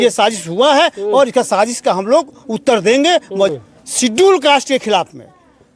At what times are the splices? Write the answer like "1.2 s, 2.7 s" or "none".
3.5 s